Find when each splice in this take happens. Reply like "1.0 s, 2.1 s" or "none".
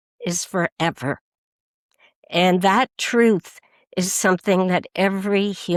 none